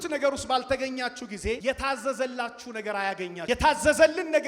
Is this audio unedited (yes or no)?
no